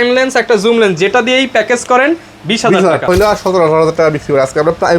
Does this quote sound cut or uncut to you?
cut